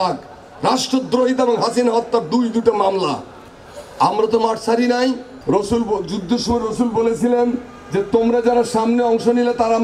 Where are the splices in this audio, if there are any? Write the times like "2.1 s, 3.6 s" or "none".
5.3 s